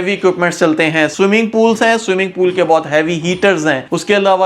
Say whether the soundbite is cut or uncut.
uncut